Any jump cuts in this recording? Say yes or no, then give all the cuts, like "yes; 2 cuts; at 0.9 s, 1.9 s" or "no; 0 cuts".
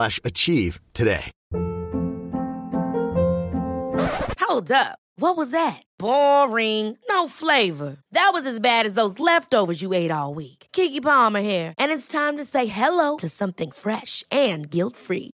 yes; 1 cut; at 1.3 s